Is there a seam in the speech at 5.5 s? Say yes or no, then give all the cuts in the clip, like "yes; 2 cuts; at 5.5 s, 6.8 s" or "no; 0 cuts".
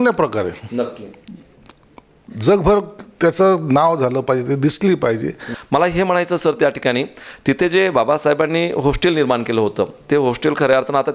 yes; 1 cut; at 5.5 s